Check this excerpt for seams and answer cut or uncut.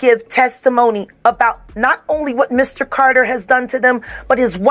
uncut